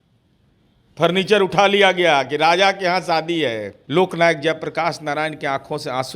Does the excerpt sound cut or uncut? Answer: cut